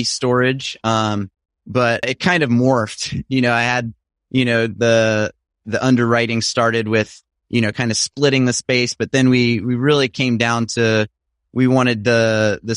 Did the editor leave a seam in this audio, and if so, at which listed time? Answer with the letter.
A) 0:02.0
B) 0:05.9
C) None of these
A